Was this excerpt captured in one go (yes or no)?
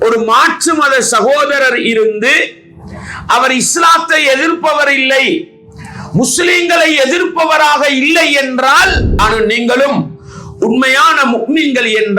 no